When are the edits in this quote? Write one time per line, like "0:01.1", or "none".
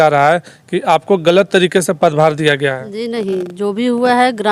none